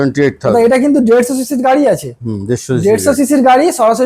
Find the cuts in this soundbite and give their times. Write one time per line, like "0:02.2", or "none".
none